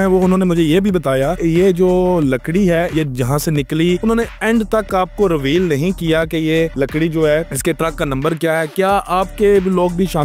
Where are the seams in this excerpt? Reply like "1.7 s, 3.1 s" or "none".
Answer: none